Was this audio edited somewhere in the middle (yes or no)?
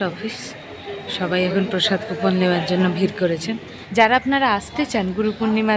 yes